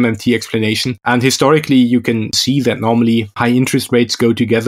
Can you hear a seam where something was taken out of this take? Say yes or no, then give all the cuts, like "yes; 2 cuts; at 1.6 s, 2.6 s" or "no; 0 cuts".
yes; 3 cuts; at 0.9 s, 2.3 s, 3.4 s